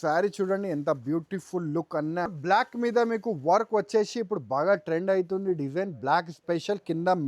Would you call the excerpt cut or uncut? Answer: cut